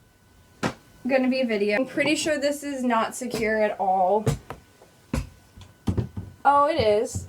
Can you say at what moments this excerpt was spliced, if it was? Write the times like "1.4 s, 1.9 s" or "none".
1.8 s